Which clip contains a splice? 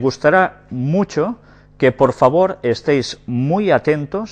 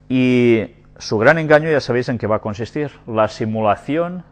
second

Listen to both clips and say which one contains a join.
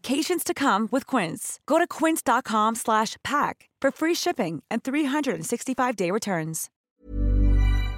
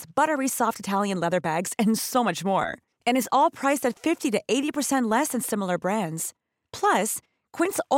first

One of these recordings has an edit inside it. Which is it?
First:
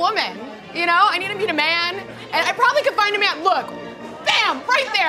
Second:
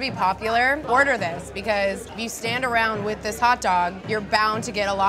second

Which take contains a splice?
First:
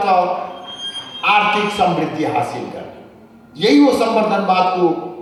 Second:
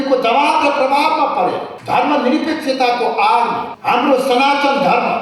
second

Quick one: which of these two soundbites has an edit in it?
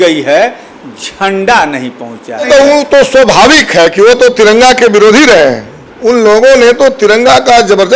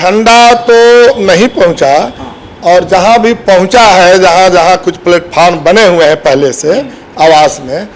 first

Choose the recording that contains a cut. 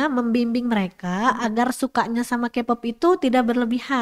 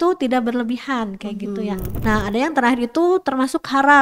second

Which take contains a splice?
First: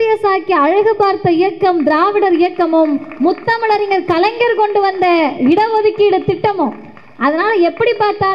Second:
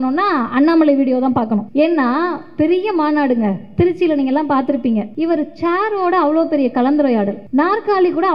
second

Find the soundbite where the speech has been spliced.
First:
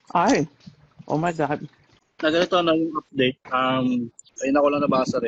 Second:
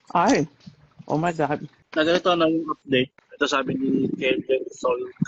second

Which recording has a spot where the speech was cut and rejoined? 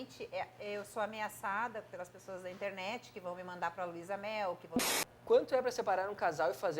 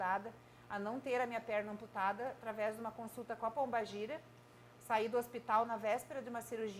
first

